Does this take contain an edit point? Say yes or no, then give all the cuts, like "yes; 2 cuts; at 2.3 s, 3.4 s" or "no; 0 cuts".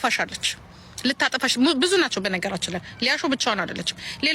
no; 0 cuts